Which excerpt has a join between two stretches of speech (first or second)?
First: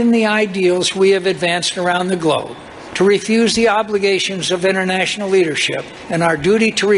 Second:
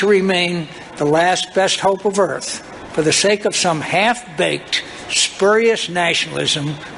first